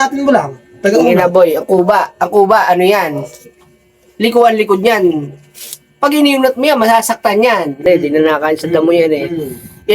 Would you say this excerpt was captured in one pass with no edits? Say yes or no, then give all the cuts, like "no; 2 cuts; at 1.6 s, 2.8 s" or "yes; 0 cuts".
no; 1 cut; at 7.8 s